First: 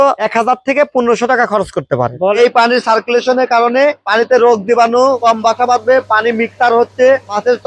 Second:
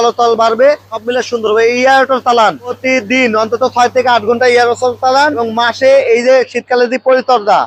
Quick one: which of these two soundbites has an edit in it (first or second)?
first